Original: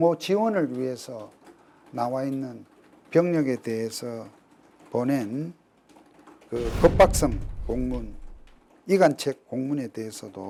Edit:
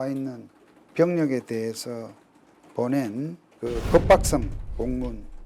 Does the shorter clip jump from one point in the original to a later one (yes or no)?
yes